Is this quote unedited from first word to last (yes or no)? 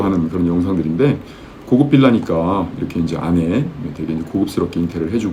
yes